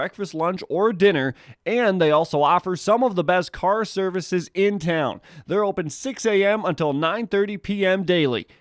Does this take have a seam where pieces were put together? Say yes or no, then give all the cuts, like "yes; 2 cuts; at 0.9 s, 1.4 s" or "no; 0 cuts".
yes; 1 cut; at 7.1 s